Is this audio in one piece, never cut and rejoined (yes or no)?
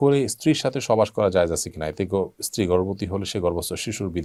yes